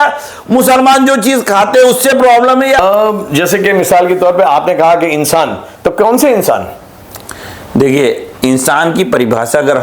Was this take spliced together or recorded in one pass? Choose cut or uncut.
uncut